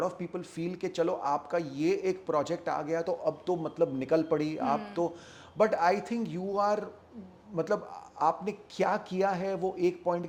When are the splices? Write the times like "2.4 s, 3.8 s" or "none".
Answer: none

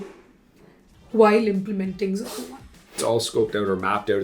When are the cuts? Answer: 3.0 s

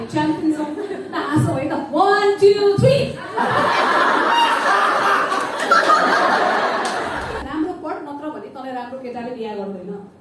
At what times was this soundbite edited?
7.4 s

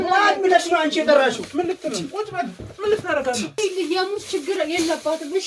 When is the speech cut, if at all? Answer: 3.6 s

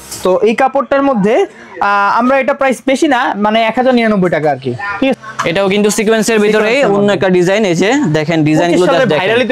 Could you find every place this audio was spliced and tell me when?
5.2 s

